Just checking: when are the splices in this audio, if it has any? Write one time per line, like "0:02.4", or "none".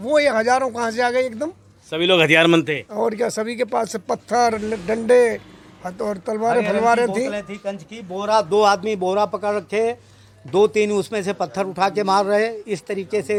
none